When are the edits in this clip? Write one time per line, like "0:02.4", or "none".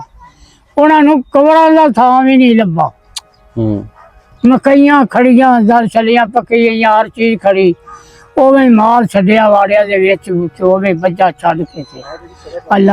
0:04.2

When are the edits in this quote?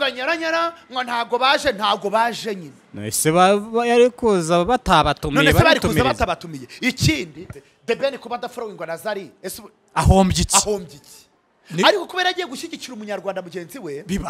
0:07.5

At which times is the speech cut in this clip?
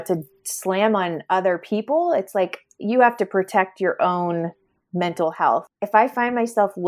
0:05.7

